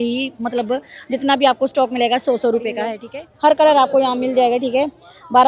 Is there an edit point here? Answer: yes; 1 cut; at 3.0 s

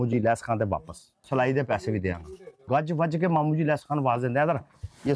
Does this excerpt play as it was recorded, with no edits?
no; 2 cuts; at 1.2 s, 2.6 s

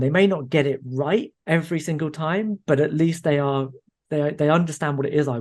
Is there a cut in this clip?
yes; 1 cut; at 1.3 s

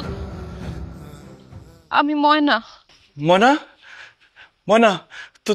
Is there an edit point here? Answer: no; 0 cuts

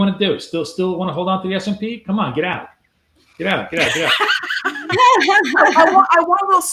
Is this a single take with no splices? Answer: yes; 0 cuts

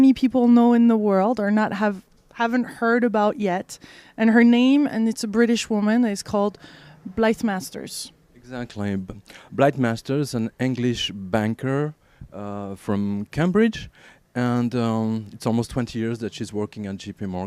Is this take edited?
yes; 1 cut; at 15.5 s

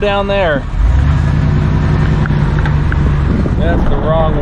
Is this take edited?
no; 0 cuts

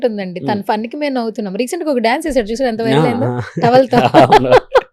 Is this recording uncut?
yes; 0 cuts

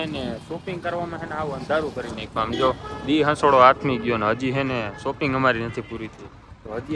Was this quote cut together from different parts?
no; 0 cuts

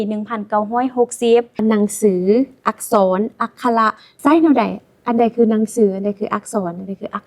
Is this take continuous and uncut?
no; 2 cuts; at 1.6 s, 4.1 s

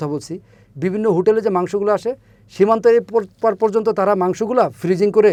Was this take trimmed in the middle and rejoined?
no; 0 cuts

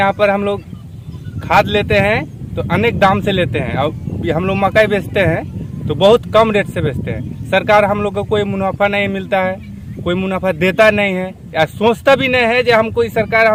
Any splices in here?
no; 0 cuts

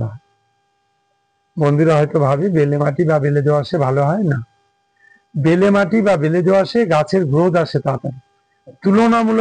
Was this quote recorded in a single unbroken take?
yes; 0 cuts

